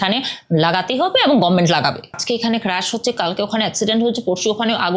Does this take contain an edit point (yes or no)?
yes